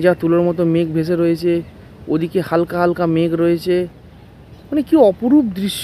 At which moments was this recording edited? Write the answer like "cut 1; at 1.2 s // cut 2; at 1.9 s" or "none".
none